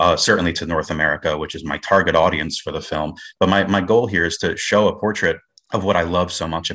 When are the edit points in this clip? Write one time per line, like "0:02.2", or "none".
0:05.5